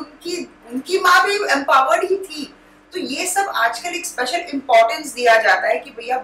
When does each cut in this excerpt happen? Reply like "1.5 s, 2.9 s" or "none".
none